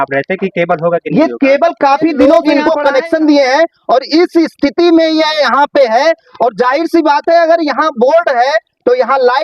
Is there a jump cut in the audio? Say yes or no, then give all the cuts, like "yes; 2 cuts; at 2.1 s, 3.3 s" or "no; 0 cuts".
yes; 1 cut; at 2.5 s